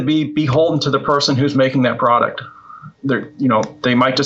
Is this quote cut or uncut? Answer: uncut